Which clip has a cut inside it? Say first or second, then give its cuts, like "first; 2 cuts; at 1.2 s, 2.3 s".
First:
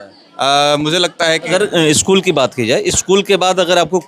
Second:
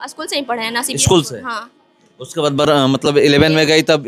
first; 1 cut; at 1.4 s